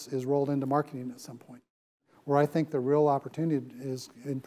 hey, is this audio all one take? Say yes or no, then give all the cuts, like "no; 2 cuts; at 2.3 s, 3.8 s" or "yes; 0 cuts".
no; 1 cut; at 2.1 s